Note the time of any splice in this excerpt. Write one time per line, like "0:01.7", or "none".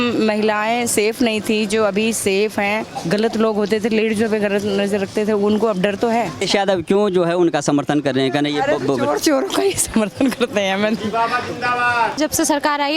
0:02.9
0:06.4
0:12.2